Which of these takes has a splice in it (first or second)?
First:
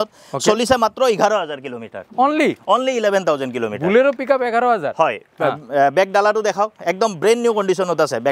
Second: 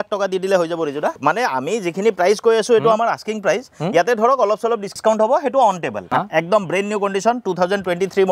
second